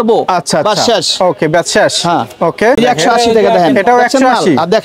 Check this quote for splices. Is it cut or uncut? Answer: cut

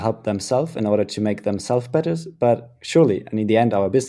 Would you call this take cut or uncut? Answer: uncut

